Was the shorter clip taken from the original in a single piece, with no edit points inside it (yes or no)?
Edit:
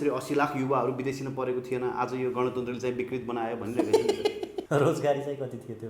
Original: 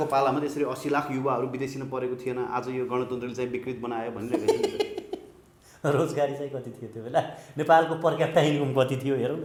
no